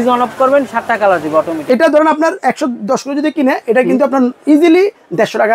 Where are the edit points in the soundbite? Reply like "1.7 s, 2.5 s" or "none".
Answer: 1.6 s